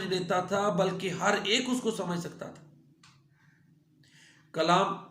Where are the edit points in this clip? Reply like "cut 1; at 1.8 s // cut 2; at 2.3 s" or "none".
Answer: cut 1; at 3.3 s